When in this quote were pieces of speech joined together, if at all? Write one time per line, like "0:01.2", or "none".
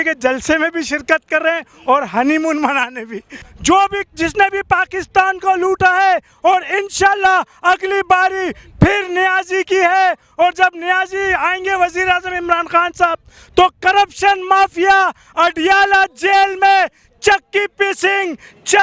0:03.5